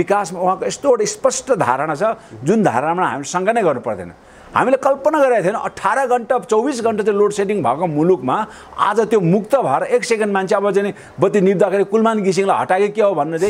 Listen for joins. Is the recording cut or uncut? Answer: uncut